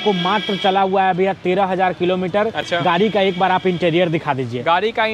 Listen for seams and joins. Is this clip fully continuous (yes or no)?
yes